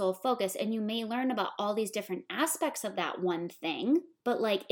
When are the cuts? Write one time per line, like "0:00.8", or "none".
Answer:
none